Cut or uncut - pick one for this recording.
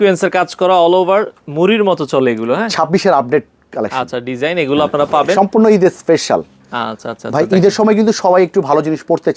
uncut